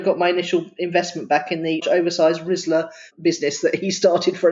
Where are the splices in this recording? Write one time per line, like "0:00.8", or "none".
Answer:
0:01.8
0:03.1